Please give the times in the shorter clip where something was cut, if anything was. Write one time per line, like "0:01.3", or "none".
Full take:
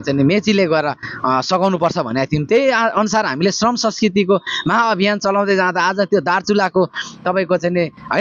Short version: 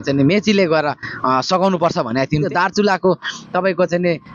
0:02.5